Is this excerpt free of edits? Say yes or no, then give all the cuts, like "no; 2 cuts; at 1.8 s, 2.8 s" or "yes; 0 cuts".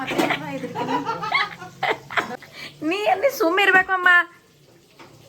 no; 1 cut; at 2.3 s